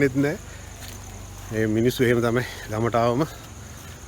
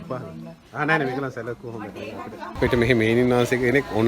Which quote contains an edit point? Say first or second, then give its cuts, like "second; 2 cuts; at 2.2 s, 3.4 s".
second; 1 cut; at 2.5 s